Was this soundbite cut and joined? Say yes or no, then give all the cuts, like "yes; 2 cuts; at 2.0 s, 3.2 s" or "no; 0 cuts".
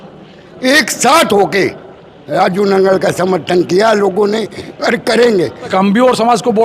yes; 1 cut; at 5.6 s